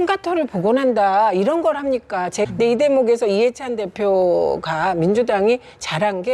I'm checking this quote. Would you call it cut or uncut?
cut